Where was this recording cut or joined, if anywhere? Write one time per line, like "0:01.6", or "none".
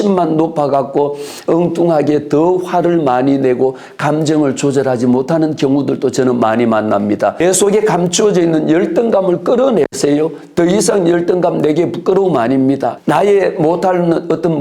0:07.4
0:12.9